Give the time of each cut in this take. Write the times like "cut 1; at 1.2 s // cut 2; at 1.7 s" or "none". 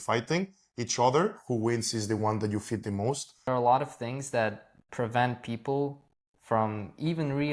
cut 1; at 3.5 s